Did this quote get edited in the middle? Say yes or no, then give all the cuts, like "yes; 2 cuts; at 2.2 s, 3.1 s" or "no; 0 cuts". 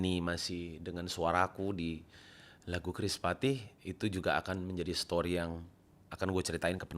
no; 0 cuts